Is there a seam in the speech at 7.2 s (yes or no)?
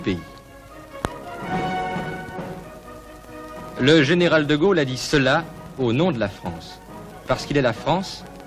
no